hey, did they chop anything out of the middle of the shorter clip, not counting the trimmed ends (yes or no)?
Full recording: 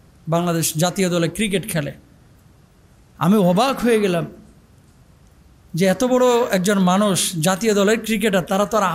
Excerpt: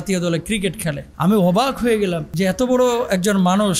yes